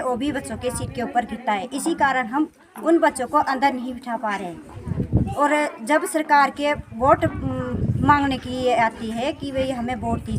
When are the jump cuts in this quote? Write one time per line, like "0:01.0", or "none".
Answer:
none